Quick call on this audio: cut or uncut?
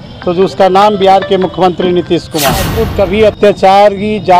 cut